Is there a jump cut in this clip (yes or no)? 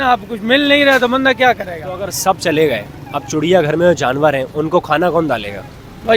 no